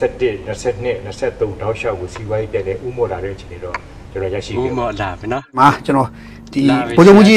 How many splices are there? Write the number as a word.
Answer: zero